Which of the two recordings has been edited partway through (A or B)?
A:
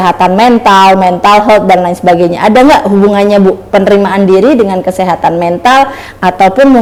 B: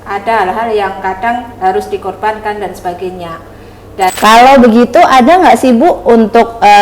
B